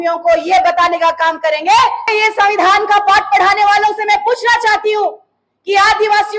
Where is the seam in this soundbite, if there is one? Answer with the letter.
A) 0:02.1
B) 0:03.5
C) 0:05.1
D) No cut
A